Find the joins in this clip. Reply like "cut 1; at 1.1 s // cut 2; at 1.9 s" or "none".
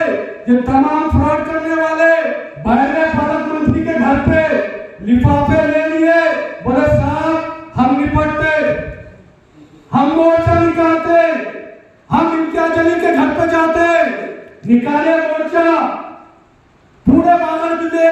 none